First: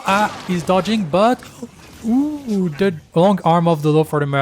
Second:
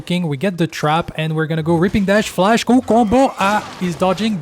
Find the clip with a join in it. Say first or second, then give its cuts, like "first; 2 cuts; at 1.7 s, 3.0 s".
first; 1 cut; at 3.0 s